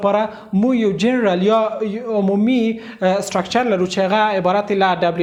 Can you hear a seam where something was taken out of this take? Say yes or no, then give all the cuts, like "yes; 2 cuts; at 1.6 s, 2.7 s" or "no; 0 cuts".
no; 0 cuts